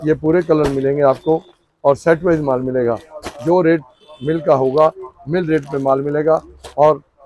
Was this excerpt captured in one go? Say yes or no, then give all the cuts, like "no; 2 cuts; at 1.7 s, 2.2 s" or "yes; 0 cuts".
yes; 0 cuts